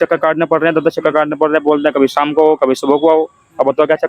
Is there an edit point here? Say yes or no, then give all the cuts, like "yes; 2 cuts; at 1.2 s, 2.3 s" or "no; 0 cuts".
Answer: no; 0 cuts